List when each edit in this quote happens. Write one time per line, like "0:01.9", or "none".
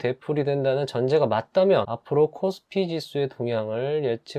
none